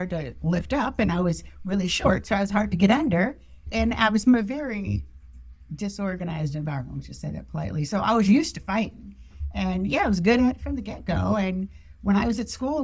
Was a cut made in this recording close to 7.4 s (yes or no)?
no